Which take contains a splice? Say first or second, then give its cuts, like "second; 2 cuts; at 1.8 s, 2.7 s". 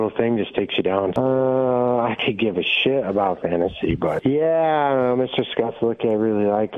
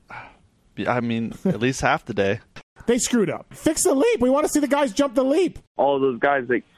second; 3 cuts; at 2.7 s, 3.5 s, 5.7 s